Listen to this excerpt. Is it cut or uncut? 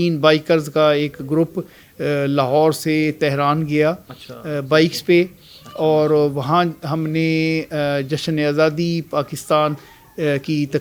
uncut